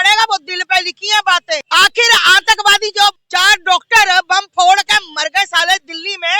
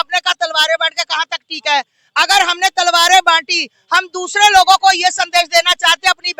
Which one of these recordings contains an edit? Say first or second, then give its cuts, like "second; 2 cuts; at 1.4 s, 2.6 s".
first; 2 cuts; at 1.6 s, 3.2 s